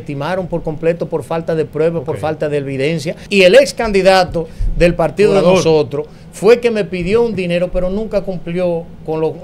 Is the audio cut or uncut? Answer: cut